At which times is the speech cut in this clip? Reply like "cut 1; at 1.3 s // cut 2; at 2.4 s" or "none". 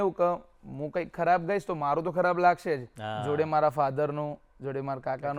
none